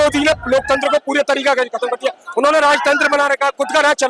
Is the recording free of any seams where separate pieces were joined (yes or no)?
yes